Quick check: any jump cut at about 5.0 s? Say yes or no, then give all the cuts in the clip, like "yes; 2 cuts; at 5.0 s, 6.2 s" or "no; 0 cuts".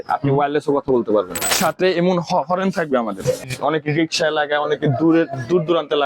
no; 2 cuts; at 1.5 s, 3.5 s